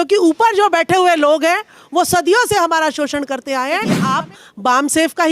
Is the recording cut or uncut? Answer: cut